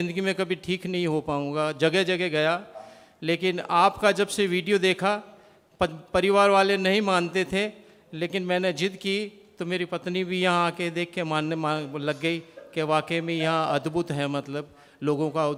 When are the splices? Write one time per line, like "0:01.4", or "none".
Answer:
none